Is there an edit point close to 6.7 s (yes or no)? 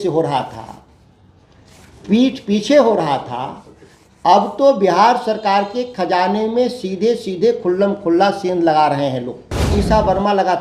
no